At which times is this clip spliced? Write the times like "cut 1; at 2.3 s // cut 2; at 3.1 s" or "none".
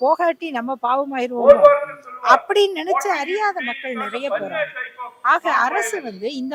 none

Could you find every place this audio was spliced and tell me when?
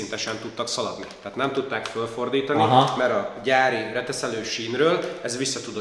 none

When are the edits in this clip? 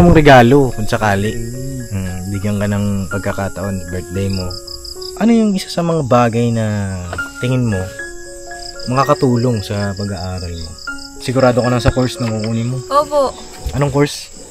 cut 1; at 5.0 s // cut 2; at 11.1 s

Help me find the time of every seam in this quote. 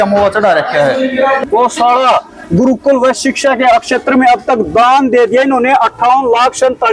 cut 1; at 1.4 s

